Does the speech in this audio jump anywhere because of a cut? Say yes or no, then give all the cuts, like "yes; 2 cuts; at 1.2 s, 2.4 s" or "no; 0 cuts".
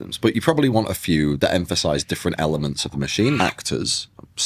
yes; 2 cuts; at 1.4 s, 3.4 s